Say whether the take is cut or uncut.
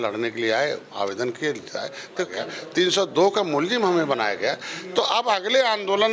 cut